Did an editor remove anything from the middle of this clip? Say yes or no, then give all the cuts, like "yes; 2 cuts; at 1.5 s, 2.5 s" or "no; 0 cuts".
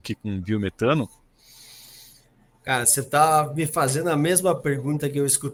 no; 0 cuts